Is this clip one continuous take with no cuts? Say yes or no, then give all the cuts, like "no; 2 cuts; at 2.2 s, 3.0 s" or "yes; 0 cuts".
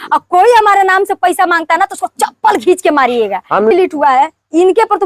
no; 1 cut; at 3.7 s